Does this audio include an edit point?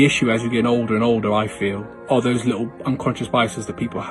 yes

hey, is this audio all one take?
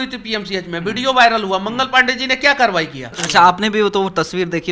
no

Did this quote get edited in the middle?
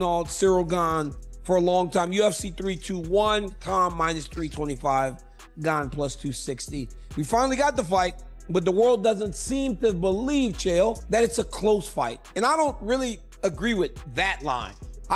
no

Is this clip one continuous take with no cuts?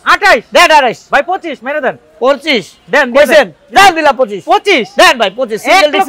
yes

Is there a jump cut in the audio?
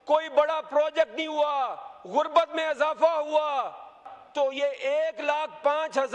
yes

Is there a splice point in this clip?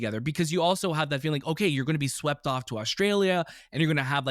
no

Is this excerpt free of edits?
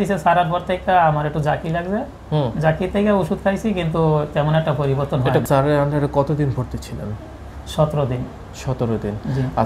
no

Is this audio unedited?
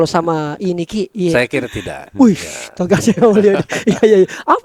yes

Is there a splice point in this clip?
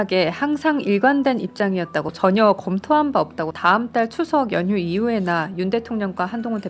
yes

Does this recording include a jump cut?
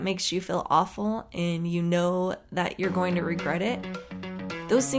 no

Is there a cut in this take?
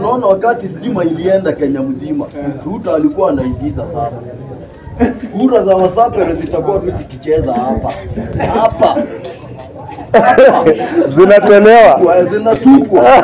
no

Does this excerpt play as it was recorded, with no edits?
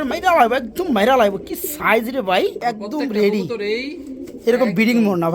no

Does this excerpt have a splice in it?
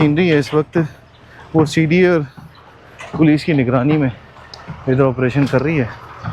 no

